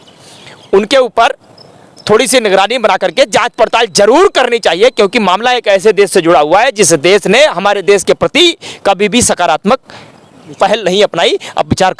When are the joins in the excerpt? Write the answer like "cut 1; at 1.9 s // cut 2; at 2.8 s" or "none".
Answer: none